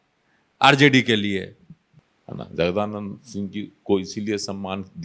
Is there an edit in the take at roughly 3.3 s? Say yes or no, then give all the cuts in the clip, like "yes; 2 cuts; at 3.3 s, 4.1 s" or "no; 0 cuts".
no; 1 cut; at 2.0 s